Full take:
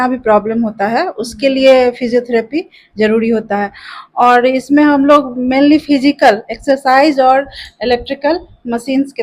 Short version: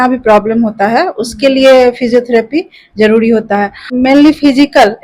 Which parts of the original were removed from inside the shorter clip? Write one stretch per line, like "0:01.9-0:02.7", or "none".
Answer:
0:03.9-0:05.3

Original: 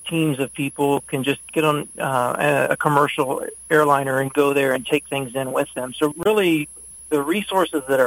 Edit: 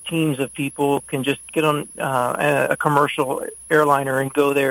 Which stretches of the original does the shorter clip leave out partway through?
none

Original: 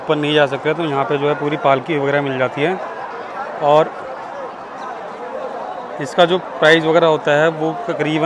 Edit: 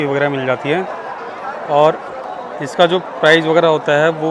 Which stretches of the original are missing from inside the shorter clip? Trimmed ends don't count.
0:04.2-0:05.6

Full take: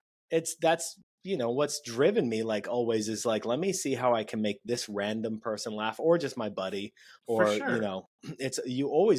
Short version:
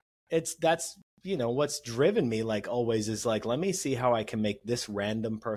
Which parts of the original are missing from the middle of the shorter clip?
none

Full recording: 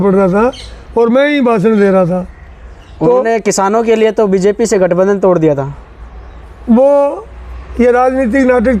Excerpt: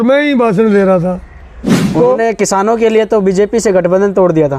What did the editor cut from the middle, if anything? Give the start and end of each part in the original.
none

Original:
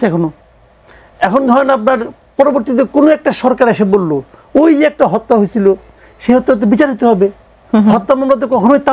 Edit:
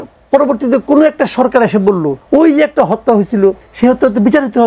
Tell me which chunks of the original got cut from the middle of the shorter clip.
0:04.2-0:04.4
0:05.9-0:06.1

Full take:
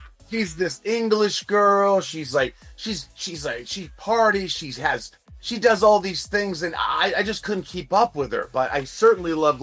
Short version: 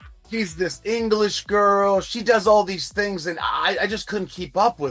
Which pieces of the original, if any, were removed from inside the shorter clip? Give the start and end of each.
0:02.1-0:05.5

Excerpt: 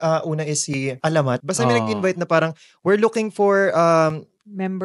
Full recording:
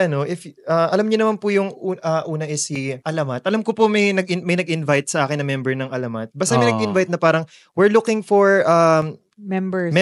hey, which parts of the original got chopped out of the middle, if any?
0:03.4-0:06.3

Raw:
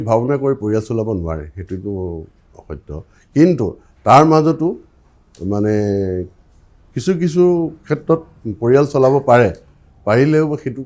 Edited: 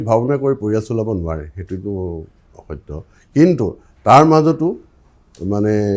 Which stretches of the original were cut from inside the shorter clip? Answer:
none

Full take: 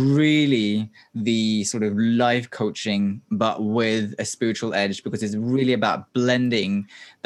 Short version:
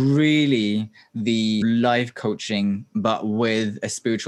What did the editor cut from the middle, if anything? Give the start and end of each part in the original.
0:01.6-0:02.0

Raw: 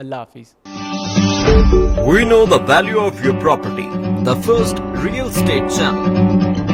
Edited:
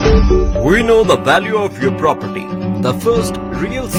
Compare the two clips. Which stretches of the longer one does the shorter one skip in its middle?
none

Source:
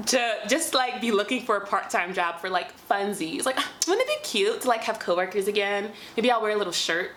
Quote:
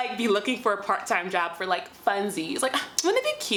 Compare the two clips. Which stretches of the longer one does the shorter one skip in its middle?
none

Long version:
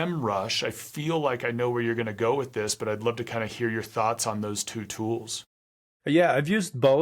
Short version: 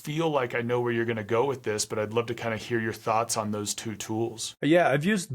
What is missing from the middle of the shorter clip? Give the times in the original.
0:05.3-0:05.9

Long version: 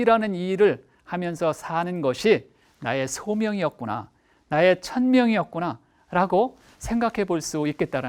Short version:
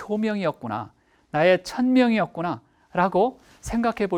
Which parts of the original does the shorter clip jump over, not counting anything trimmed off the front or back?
none

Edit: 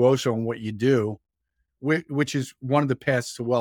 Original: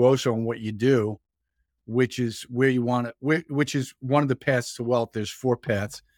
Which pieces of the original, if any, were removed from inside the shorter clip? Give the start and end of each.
0:01.7-0:03.1

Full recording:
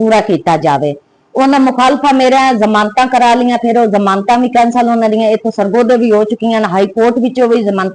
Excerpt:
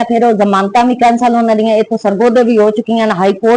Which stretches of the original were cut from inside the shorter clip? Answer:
none

